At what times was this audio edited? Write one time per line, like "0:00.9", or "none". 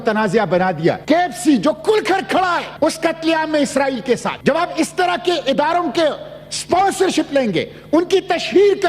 0:01.0
0:02.7
0:04.3